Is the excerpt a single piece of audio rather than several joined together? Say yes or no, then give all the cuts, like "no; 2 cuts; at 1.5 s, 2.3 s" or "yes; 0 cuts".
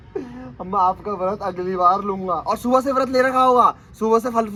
yes; 0 cuts